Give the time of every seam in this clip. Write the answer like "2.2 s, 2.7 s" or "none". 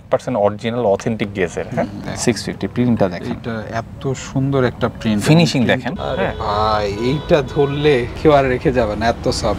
5.9 s